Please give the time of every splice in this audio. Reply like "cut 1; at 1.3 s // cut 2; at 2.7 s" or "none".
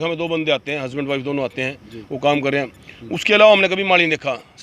none